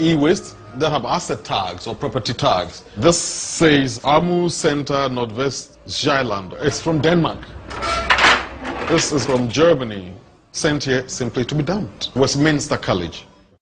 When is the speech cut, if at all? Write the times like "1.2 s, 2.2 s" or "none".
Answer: none